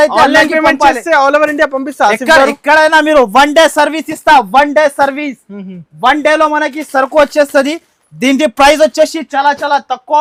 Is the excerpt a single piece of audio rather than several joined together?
yes; 0 cuts

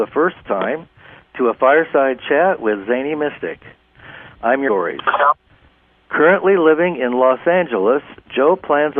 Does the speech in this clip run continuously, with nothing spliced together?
yes; 0 cuts

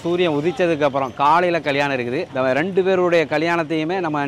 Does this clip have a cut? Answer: no; 0 cuts

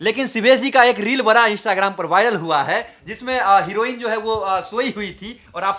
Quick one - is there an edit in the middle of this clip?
no; 0 cuts

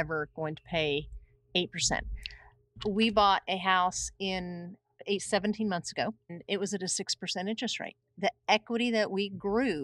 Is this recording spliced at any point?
yes; 3 cuts; at 2.7 s, 6.4 s, 8.0 s

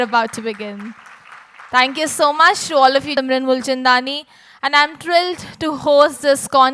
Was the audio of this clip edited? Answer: yes; 1 cut; at 3.1 s

